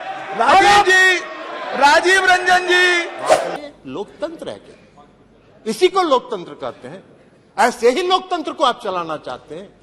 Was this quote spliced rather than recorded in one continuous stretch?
yes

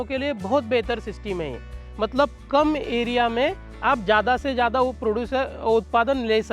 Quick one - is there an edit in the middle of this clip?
no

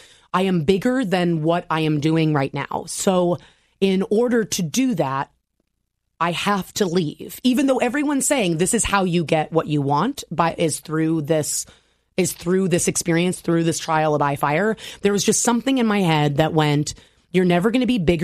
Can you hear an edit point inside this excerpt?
no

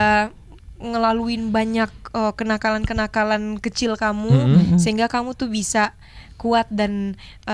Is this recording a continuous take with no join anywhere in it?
yes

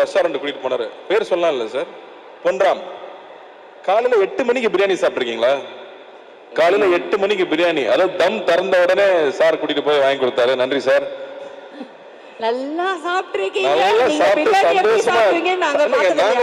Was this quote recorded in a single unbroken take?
yes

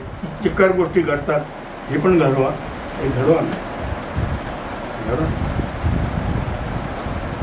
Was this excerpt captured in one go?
yes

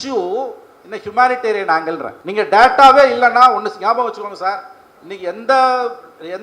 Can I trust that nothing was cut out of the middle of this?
no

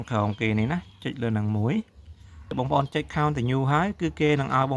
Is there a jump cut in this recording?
yes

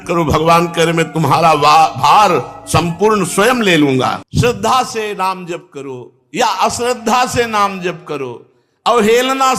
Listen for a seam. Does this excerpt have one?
yes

